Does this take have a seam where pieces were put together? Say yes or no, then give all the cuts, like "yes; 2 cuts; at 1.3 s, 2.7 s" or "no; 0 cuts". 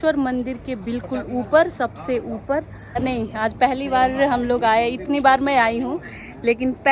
yes; 1 cut; at 3.0 s